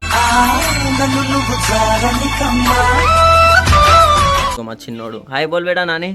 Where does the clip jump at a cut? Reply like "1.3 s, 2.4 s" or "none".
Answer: 4.6 s